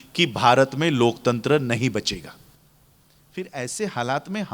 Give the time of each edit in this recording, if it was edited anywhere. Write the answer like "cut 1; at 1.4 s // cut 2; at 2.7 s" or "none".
none